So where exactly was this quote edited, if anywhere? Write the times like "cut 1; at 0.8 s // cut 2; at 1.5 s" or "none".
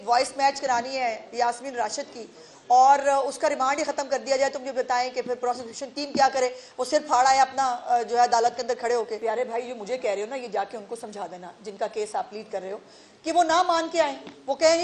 cut 1; at 9.1 s